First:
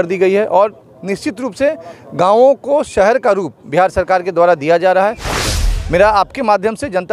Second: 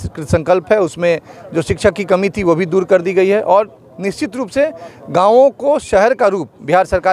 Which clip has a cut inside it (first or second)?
first